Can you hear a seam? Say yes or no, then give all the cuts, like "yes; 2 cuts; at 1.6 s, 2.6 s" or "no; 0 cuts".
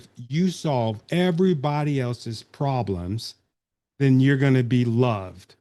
no; 0 cuts